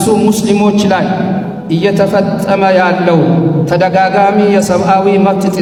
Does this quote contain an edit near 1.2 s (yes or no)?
no